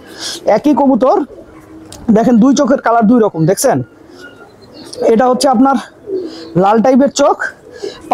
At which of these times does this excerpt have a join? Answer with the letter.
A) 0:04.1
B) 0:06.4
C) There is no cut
C